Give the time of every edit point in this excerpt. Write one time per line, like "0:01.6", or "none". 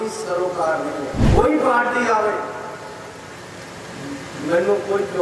0:01.2